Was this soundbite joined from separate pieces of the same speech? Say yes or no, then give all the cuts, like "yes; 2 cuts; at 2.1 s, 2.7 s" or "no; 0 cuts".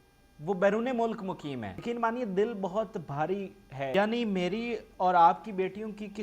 yes; 2 cuts; at 1.7 s, 3.9 s